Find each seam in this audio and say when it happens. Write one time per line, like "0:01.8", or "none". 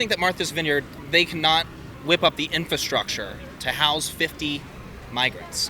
0:01.0
0:01.8